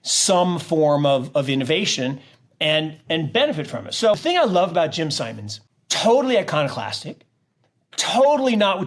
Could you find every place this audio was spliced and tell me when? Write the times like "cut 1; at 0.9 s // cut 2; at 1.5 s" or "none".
cut 1; at 4.2 s